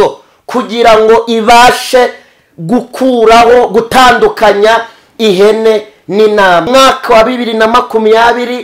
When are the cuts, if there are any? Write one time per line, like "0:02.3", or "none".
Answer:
0:06.7